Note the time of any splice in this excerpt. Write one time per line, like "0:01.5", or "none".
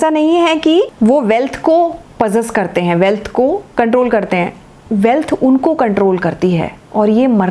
0:00.9
0:03.7